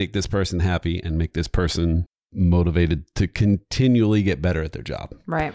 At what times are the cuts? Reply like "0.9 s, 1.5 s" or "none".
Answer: 2.2 s